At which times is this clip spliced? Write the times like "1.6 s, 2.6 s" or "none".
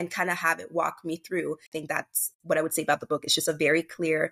1.7 s